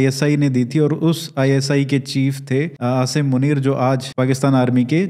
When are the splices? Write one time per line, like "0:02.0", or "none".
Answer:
0:02.7
0:04.1